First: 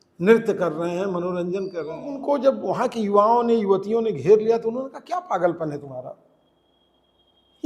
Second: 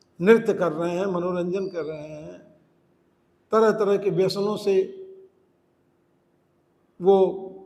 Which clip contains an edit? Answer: first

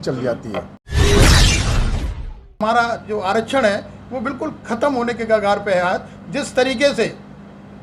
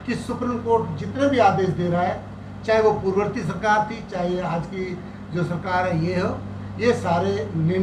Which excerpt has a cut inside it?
first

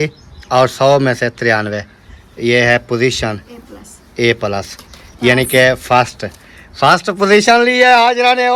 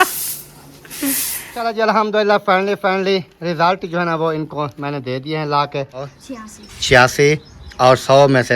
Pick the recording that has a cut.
second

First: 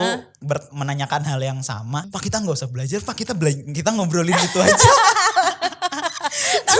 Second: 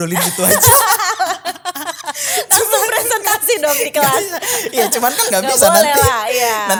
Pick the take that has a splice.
first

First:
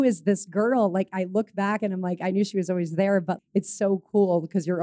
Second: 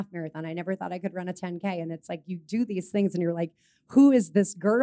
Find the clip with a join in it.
first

